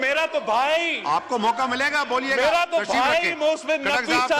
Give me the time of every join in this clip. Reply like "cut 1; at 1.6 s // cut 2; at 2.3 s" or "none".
none